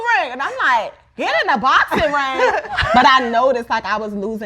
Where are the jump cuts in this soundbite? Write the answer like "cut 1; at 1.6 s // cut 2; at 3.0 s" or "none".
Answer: cut 1; at 2.8 s